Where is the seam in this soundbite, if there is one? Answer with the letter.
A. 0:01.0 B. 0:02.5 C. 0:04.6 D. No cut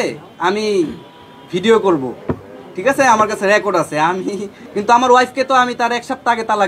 C